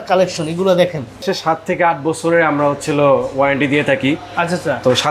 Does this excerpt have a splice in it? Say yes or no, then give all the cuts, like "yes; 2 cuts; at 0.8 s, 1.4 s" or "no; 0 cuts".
yes; 1 cut; at 1.2 s